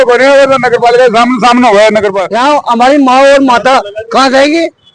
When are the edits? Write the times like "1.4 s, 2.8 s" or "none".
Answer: 2.2 s